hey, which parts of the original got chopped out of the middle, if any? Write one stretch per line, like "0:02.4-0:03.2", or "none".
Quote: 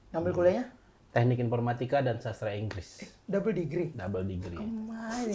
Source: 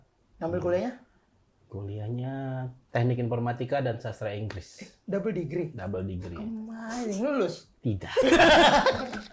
0:01.2-0:02.7